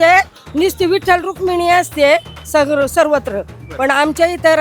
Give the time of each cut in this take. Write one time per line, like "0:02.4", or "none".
none